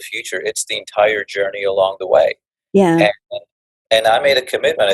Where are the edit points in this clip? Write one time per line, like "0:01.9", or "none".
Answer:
none